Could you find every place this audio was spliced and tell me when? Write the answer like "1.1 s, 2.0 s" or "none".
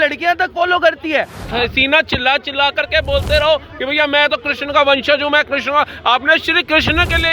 1.4 s